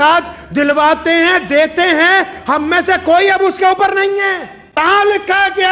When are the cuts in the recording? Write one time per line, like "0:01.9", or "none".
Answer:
0:04.8

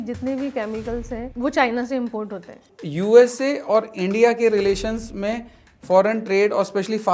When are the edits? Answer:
0:01.3
0:02.7

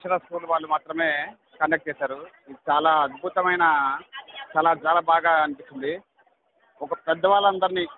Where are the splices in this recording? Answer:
none

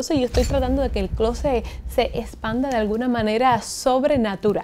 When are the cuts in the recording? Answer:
none

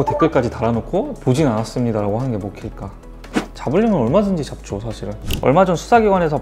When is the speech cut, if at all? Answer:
0:03.3
0:05.3

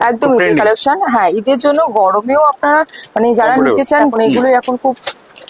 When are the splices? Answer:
0:04.0

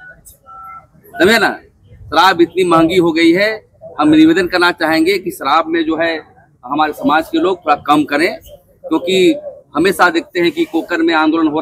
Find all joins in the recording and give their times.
none

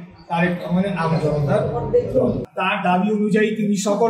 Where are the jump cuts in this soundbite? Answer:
0:02.4

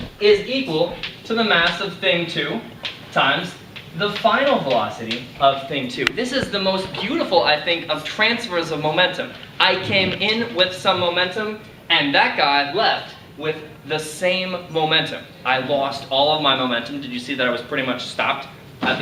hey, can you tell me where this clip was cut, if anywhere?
none

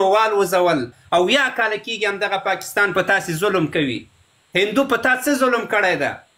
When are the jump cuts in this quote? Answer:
0:01.0

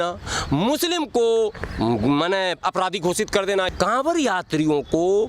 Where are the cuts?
0:03.7

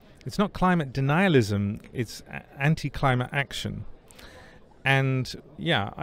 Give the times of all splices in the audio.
0:01.8

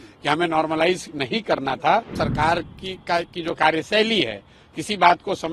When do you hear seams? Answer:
0:02.1

